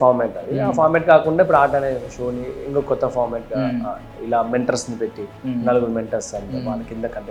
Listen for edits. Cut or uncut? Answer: uncut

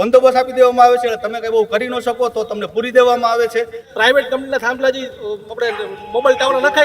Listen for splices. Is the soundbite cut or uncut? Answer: cut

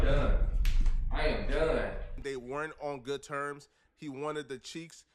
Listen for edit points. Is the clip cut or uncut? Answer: cut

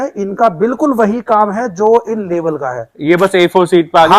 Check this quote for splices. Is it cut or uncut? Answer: uncut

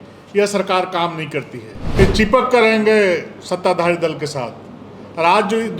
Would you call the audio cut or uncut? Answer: cut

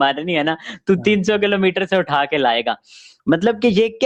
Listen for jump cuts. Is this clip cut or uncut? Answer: uncut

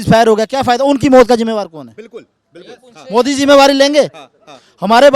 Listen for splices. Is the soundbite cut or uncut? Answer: uncut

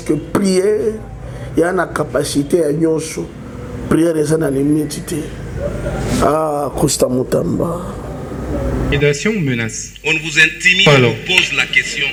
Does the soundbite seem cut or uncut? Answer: uncut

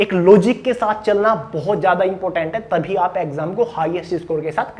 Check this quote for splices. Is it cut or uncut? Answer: uncut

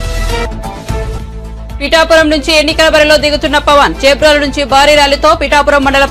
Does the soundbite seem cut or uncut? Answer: uncut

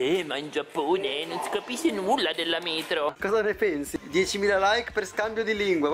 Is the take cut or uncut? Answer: cut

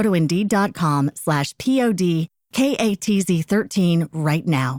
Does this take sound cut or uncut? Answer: uncut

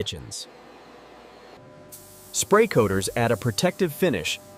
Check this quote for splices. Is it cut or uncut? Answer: cut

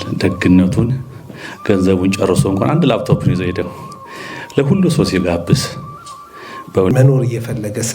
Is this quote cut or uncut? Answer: cut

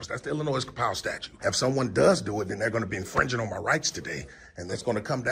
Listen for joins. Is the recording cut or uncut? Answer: cut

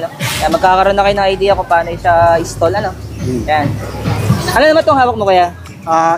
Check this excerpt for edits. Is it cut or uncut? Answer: uncut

